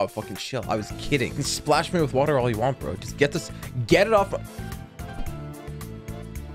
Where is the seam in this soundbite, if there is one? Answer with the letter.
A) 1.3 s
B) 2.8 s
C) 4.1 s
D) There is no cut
A